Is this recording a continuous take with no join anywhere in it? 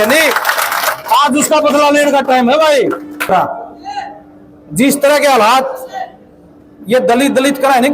no; 1 cut; at 3.3 s

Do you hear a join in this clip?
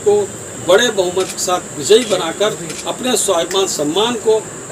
no; 0 cuts

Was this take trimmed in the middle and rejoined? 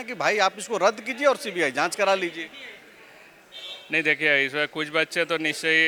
no; 0 cuts

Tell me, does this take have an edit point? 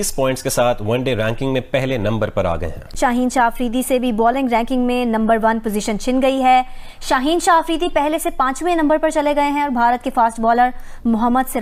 no; 0 cuts

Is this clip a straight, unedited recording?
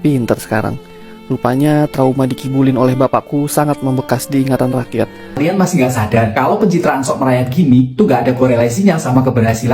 no; 1 cut; at 5.3 s

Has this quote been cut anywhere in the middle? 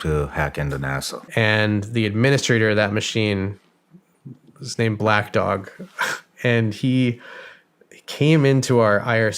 yes; 1 cut; at 1.2 s

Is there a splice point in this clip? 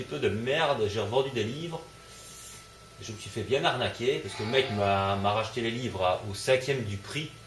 yes; 1 cut; at 5.5 s

